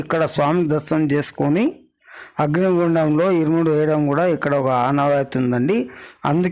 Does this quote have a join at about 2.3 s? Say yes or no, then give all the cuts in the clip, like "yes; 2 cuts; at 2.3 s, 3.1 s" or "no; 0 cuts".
no; 0 cuts